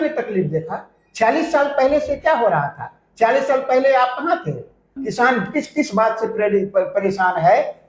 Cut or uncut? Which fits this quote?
cut